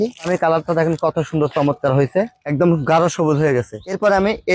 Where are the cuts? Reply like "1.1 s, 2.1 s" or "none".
none